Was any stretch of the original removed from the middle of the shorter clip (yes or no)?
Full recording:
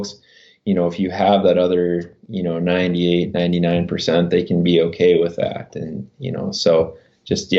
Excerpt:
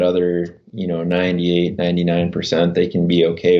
no